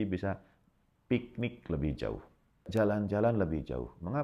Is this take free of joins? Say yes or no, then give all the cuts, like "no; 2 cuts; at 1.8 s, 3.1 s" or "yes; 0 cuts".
no; 1 cut; at 2.7 s